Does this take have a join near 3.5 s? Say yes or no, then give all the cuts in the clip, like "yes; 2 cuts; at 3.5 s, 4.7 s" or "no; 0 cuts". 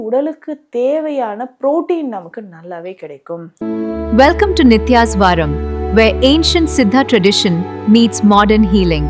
yes; 1 cut; at 3.5 s